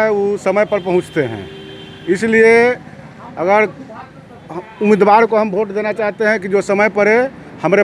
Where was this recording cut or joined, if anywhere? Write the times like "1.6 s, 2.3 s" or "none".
none